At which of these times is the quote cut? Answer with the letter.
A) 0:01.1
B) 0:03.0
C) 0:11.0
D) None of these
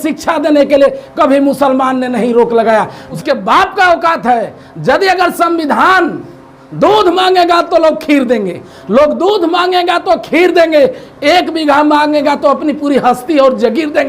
B